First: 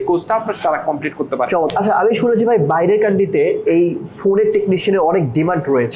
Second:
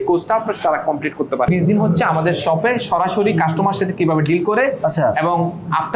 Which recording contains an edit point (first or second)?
second